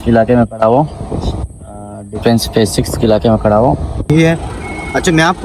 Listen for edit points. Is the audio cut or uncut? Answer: cut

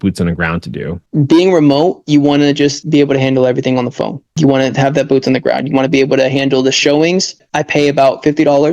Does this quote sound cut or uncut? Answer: cut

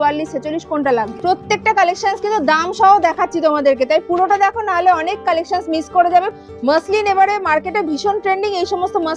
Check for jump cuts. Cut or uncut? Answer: cut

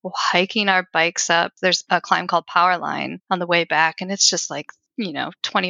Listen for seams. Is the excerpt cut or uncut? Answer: cut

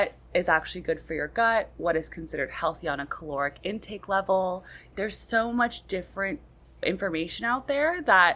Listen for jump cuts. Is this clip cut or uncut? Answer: cut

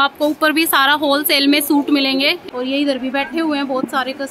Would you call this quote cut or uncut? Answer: cut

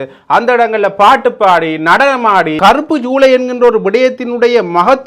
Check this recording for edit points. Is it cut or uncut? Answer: cut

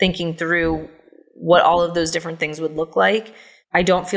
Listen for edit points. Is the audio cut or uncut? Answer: uncut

